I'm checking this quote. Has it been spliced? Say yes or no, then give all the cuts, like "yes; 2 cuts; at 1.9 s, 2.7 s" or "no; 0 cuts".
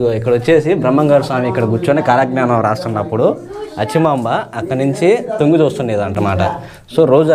no; 0 cuts